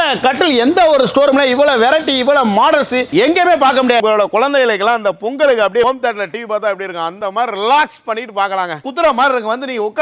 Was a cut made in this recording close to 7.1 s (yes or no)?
no